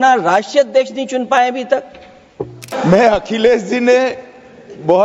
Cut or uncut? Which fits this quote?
cut